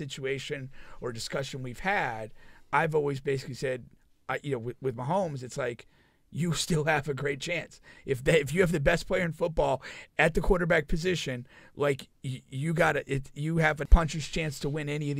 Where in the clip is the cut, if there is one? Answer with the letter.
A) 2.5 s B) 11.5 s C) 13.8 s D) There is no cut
C